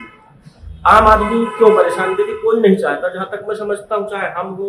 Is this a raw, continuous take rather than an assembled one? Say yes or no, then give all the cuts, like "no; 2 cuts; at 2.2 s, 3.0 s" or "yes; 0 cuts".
yes; 0 cuts